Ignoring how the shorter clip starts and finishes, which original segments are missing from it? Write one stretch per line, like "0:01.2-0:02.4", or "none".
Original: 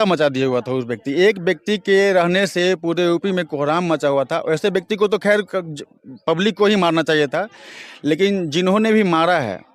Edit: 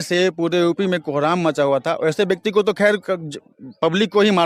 none